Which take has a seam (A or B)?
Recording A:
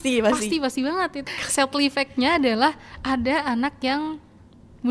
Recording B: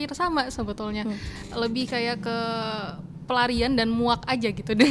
A